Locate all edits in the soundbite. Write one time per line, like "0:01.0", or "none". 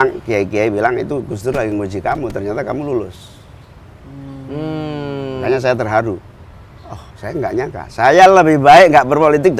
none